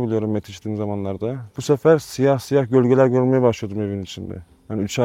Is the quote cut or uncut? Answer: cut